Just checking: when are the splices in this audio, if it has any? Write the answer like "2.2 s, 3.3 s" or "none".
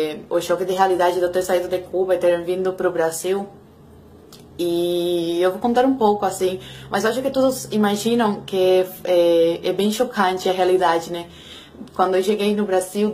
3.4 s